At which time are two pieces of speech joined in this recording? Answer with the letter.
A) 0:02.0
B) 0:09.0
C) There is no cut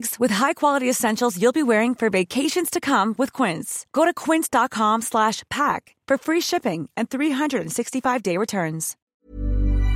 B